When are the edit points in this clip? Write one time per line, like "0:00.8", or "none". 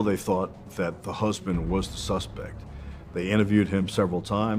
none

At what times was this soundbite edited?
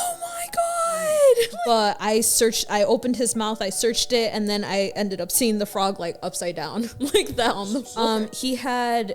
0:01.5
0:07.9

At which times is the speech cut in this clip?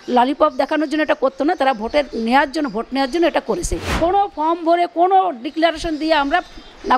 0:03.8

